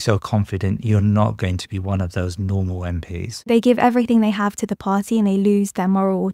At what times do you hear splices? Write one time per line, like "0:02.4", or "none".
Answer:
0:03.5